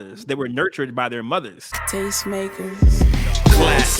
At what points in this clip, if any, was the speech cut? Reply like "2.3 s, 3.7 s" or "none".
1.8 s